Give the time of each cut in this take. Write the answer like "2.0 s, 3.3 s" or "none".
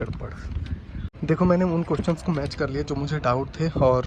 1.0 s